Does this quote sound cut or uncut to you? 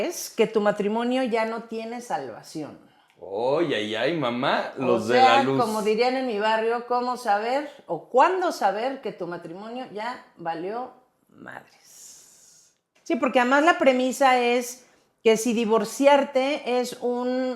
cut